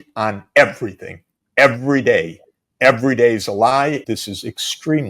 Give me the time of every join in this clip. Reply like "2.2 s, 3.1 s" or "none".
4.0 s